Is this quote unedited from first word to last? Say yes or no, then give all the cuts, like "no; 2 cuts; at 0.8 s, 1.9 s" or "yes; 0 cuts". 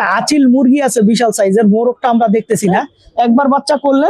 no; 1 cut; at 3.0 s